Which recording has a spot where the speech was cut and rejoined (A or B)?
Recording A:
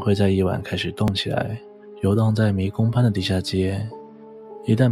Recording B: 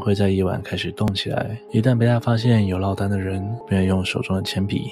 B